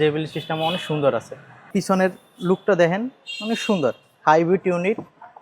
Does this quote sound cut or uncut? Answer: cut